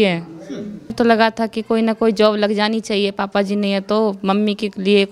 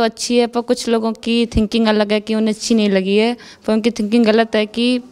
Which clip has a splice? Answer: first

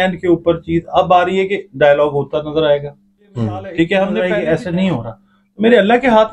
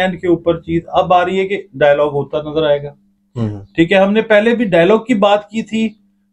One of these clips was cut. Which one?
first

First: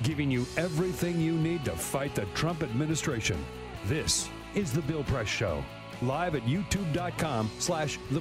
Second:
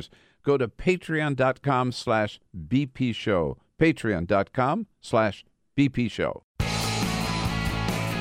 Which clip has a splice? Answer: second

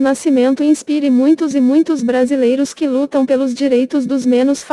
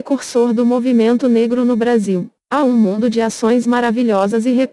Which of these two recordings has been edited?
second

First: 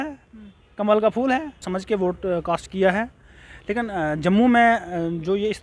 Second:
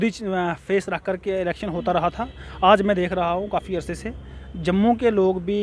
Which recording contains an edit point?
first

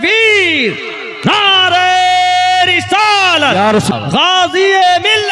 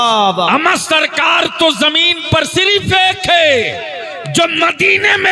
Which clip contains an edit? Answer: first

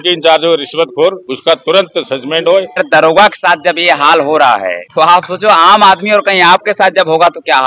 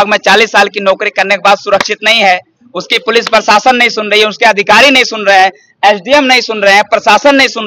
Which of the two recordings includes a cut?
first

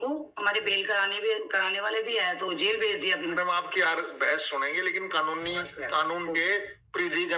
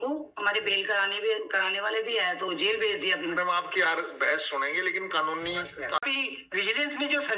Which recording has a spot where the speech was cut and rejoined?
second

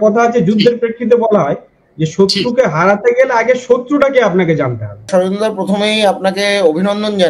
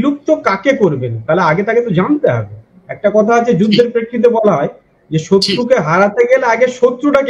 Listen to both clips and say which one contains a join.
first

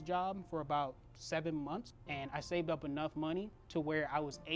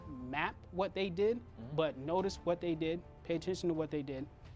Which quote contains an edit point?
first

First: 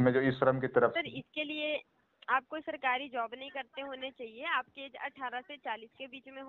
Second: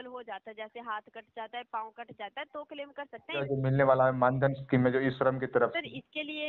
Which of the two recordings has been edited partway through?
second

